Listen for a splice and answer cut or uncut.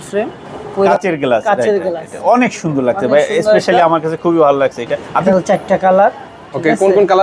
cut